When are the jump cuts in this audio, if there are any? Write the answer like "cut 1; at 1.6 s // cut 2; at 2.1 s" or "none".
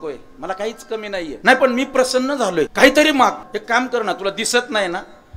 cut 1; at 1.4 s // cut 2; at 2.7 s // cut 3; at 3.5 s